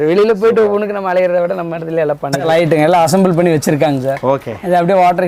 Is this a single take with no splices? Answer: yes; 0 cuts

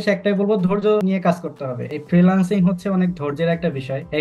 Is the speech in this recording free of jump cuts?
yes; 0 cuts

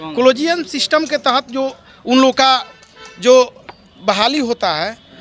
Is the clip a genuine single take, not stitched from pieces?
yes; 0 cuts

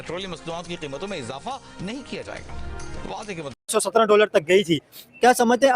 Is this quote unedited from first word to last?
no; 1 cut; at 3.6 s

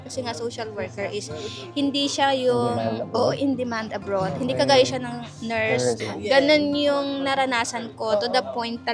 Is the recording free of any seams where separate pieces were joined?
no; 1 cut; at 6.1 s

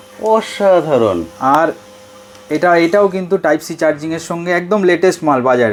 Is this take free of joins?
yes; 0 cuts

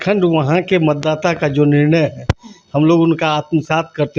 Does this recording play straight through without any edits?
yes; 0 cuts

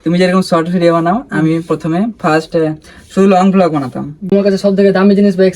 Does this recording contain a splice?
yes; 1 cut; at 4.3 s

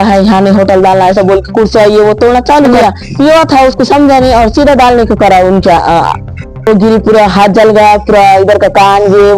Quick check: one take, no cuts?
no; 2 cuts; at 2.7 s, 6.7 s

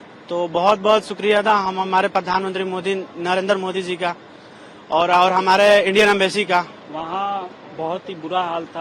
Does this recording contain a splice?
no; 0 cuts

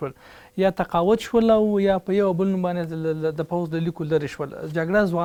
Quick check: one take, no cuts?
yes; 0 cuts

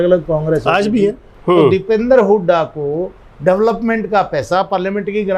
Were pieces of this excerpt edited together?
yes; 1 cut; at 1.3 s

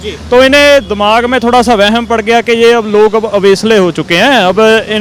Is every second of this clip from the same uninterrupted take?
yes; 0 cuts

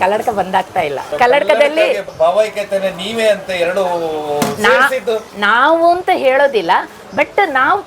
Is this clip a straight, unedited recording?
no; 2 cuts; at 1.0 s, 2.0 s

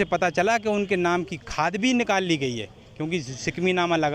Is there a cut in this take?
no; 0 cuts

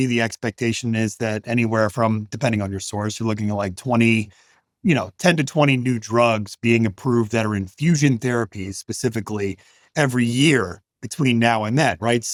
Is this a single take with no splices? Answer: yes; 0 cuts

